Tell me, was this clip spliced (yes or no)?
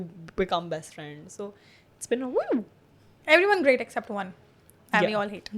no